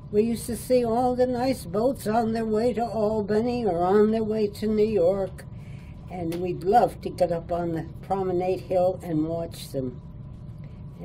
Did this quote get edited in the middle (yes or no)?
no